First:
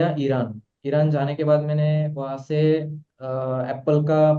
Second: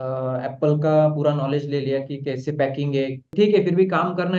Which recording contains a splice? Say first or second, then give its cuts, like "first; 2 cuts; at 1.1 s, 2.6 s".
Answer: second; 1 cut; at 3.3 s